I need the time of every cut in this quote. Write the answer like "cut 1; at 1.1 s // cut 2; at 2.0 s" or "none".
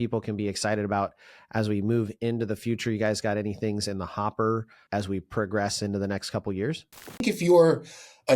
cut 1; at 7.2 s